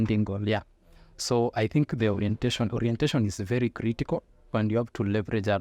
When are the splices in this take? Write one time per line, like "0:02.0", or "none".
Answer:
0:04.5